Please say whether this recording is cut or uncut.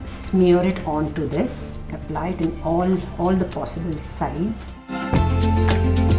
uncut